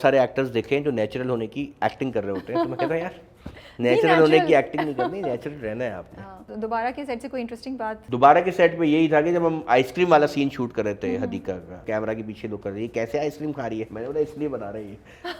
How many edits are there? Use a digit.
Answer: 3